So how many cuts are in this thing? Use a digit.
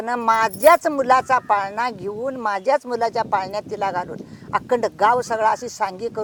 0